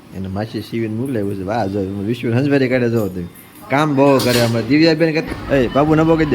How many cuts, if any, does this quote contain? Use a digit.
1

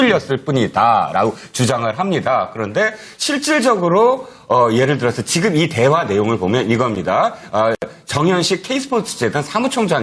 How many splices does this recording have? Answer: 1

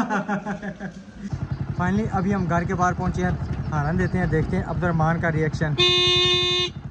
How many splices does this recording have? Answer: 1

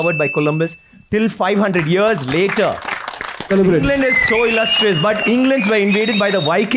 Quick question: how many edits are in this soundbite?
1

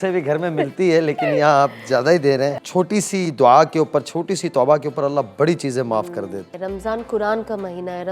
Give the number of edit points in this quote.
2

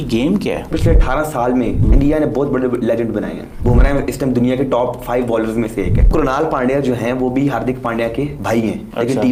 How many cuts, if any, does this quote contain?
0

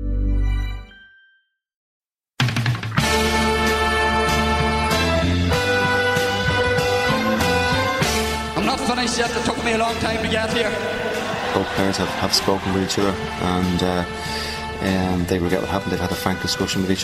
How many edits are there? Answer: 1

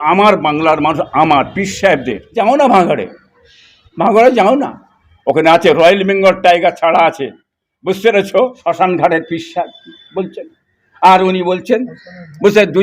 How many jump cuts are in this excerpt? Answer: 2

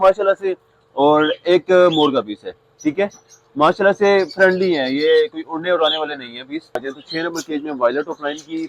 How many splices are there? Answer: 1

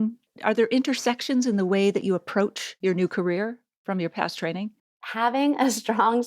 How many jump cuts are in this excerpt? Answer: 3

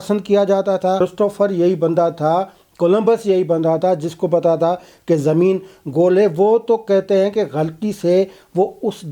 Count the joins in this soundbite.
1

